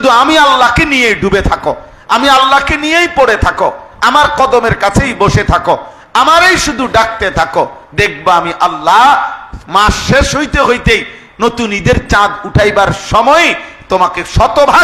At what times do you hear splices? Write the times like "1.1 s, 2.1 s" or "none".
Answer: none